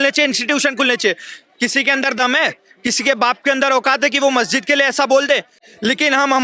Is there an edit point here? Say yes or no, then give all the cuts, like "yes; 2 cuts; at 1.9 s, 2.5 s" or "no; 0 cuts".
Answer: yes; 1 cut; at 5.6 s